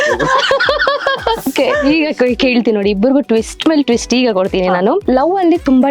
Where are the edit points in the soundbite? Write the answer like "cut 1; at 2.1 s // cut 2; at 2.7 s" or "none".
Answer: cut 1; at 1.5 s // cut 2; at 5.0 s